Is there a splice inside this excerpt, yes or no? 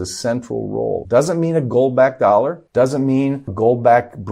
yes